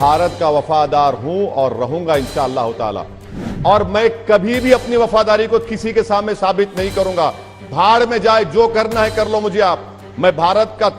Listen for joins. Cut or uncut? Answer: cut